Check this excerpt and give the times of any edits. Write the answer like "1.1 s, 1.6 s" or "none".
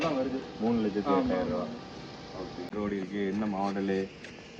2.7 s